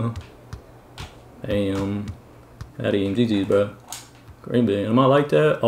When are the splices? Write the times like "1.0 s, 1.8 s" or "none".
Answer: none